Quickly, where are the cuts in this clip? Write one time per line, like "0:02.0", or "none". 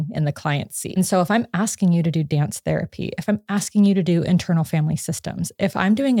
0:01.0